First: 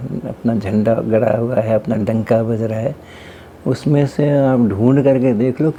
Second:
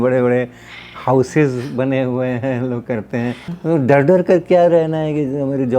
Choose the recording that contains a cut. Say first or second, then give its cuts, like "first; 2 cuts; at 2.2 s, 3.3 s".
second; 1 cut; at 3.5 s